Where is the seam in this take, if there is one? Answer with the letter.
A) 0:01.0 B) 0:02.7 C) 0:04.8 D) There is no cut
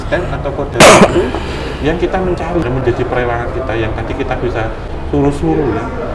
B